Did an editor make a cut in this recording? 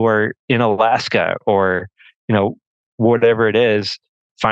no; 0 cuts

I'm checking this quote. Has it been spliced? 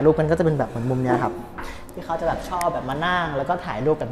no; 0 cuts

